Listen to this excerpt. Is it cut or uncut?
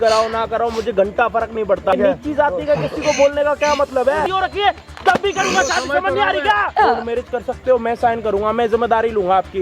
cut